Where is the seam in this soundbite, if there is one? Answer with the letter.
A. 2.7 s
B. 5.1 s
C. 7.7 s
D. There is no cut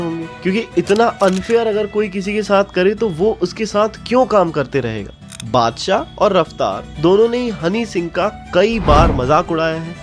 B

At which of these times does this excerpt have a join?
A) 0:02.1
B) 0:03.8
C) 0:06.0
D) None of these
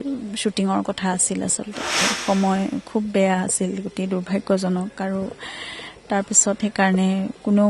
A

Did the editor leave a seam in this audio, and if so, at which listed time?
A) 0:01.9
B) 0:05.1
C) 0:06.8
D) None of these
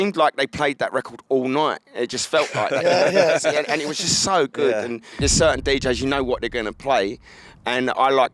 B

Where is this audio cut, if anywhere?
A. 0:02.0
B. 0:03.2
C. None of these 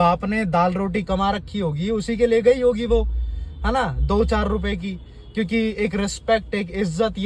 C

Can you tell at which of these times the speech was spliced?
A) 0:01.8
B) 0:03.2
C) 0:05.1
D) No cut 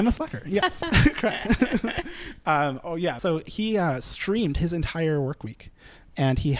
B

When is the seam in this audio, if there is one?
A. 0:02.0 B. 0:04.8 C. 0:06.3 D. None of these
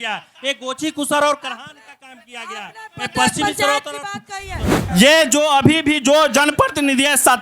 B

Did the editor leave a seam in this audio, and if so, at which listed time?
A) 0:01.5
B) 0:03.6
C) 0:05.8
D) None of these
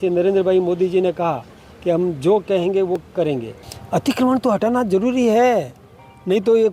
B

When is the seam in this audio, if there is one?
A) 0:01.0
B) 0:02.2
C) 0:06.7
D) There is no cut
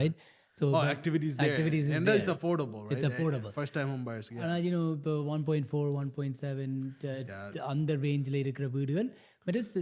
D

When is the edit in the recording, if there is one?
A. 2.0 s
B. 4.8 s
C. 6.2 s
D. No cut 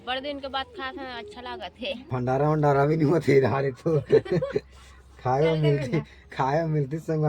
A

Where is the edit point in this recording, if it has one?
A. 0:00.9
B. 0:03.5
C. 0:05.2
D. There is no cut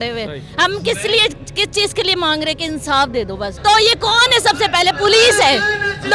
B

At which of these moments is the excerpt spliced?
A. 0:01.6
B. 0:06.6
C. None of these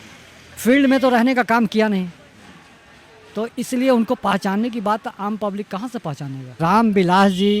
B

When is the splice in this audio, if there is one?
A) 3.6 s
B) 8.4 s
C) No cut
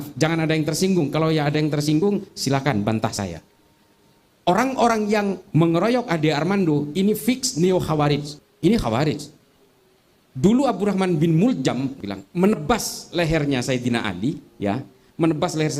B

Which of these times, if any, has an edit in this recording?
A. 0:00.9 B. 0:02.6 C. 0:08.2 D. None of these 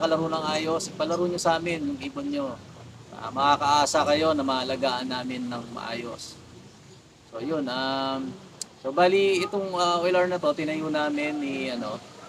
D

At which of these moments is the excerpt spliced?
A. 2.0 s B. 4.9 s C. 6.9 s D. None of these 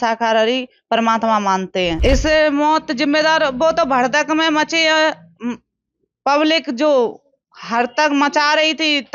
A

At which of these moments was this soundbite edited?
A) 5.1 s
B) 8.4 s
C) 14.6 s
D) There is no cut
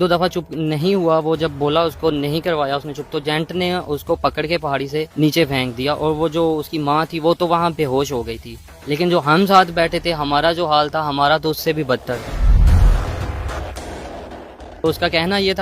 A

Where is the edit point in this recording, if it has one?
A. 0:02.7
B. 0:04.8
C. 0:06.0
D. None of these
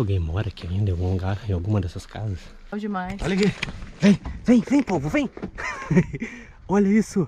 A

